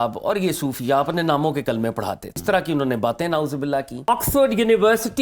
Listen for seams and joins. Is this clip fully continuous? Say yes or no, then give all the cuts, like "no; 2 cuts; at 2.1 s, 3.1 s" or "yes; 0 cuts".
no; 2 cuts; at 2.3 s, 4.1 s